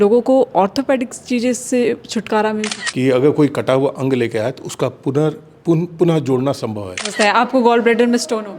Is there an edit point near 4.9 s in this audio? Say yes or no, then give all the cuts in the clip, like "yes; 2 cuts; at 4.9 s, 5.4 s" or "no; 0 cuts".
no; 2 cuts; at 2.8 s, 7.1 s